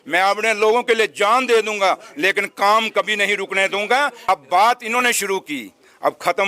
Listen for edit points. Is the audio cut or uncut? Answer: cut